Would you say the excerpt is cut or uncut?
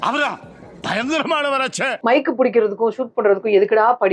cut